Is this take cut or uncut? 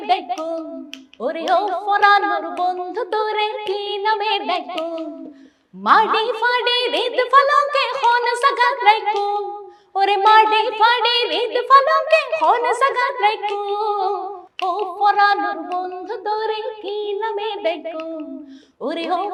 uncut